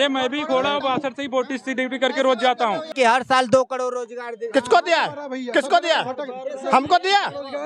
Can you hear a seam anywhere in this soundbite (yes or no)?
yes